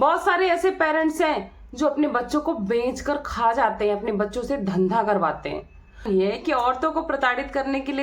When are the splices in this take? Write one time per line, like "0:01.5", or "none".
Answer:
0:06.0